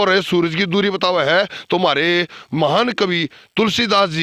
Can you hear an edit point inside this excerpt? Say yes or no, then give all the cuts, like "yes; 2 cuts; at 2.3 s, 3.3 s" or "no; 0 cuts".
no; 0 cuts